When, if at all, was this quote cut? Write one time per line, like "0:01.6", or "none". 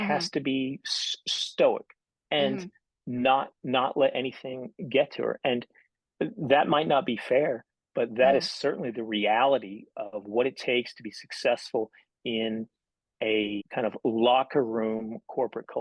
0:13.6